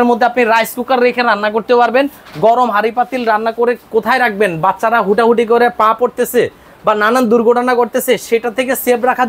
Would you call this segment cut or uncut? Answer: uncut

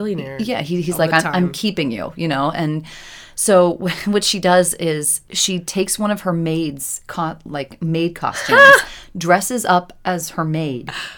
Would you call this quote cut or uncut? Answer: uncut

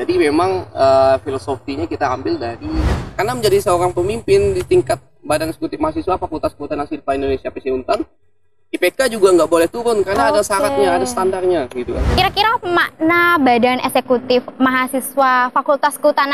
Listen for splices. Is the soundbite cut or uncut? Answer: cut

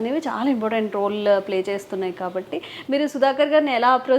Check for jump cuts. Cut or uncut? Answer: uncut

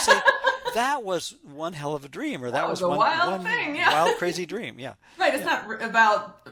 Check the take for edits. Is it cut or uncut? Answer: uncut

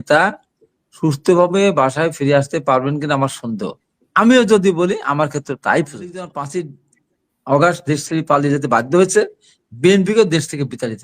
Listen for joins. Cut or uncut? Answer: cut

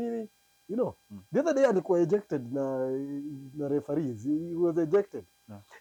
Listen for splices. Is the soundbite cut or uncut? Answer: uncut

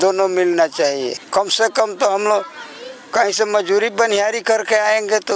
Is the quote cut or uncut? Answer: cut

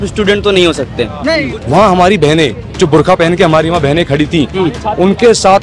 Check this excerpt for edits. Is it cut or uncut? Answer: cut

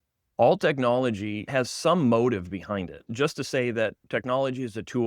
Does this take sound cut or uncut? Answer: cut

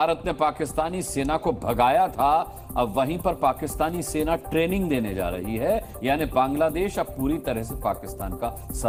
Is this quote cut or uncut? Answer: uncut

